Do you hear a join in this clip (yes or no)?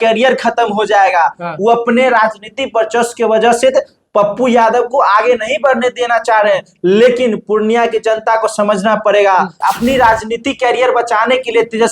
yes